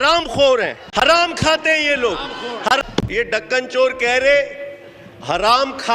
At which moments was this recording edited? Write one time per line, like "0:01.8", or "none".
0:01.1
0:02.8